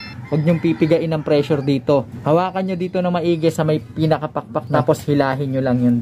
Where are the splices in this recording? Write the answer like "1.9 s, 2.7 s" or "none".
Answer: 2.1 s, 4.7 s